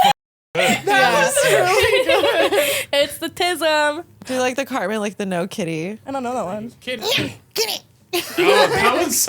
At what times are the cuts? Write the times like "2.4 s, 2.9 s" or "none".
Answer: 4.2 s, 6.0 s, 7.0 s